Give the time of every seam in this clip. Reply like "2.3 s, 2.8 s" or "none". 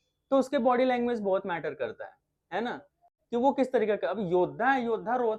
none